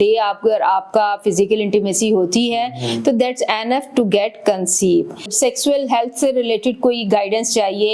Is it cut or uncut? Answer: cut